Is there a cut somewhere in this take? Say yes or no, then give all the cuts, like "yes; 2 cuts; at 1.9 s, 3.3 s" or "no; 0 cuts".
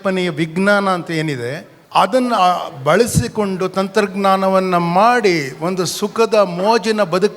yes; 1 cut; at 2.4 s